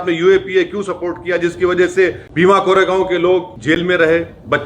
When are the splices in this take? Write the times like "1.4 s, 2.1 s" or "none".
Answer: 2.2 s, 3.5 s